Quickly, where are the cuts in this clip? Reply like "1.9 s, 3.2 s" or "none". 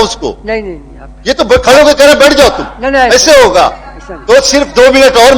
none